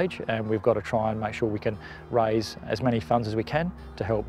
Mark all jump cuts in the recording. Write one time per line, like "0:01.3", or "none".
none